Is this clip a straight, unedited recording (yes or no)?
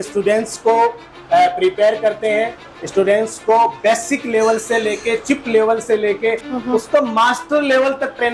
yes